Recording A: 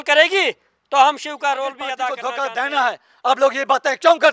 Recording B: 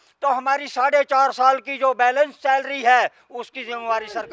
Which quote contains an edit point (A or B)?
A